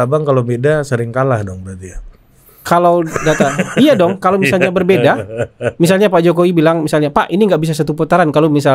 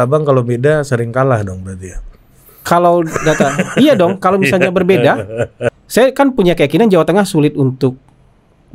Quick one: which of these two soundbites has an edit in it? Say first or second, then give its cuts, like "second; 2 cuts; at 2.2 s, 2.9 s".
second; 1 cut; at 5.6 s